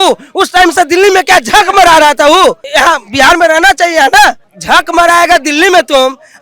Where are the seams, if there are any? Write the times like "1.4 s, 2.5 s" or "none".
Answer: 2.6 s, 4.5 s